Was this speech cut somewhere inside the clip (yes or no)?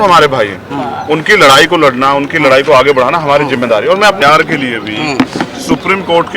yes